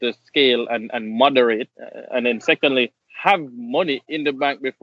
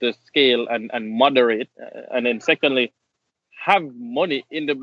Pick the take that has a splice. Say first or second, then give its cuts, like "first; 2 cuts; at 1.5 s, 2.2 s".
first; 1 cut; at 3.0 s